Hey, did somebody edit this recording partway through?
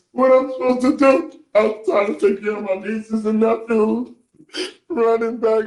no; 0 cuts

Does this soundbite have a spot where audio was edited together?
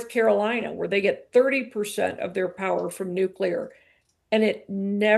no; 0 cuts

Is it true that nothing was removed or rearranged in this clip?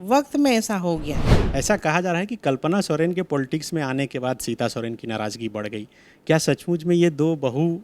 no; 1 cut; at 1.3 s

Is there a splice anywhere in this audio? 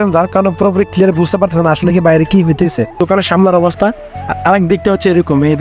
yes; 1 cut; at 3.0 s

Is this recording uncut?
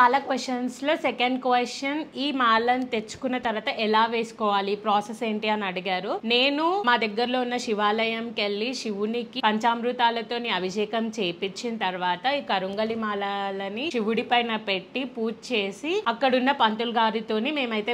yes; 0 cuts

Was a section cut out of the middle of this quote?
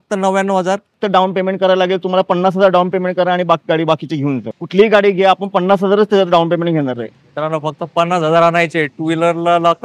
yes; 2 cuts; at 1.0 s, 4.5 s

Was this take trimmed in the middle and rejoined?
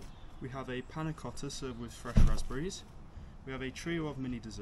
no; 0 cuts

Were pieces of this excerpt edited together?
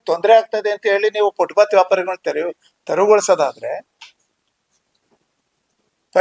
no; 0 cuts

